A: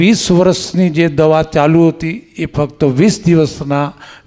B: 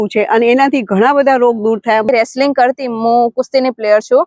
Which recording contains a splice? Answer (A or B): B